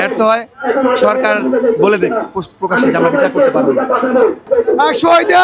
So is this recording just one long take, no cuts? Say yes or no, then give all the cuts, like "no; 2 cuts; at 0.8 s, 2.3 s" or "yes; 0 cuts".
no; 1 cut; at 4.4 s